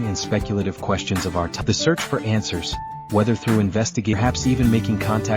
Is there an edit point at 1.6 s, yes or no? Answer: yes